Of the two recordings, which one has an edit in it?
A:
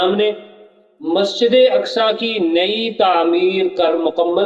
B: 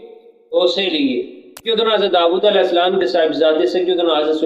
B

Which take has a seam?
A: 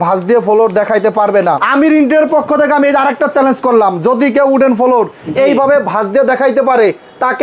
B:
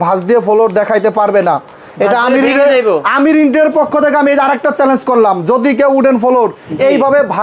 A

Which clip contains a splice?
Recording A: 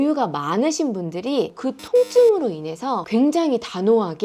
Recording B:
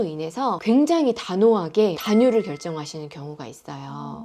A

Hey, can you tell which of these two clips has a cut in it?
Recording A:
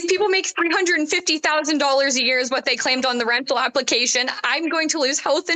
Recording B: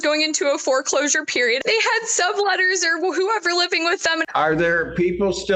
B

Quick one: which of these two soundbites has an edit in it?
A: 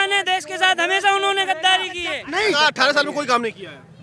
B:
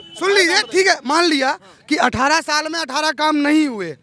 A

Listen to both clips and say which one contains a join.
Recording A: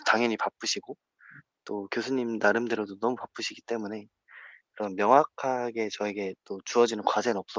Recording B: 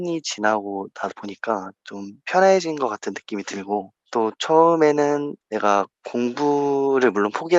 B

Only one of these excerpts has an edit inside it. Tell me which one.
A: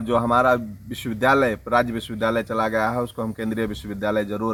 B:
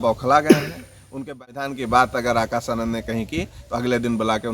B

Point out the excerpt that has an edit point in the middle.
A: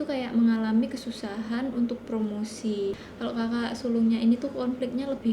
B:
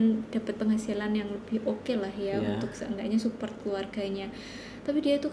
A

